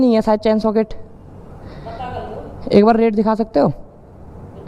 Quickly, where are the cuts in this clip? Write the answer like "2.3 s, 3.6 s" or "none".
none